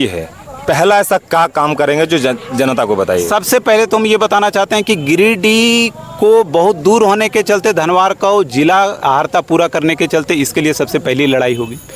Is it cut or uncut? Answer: uncut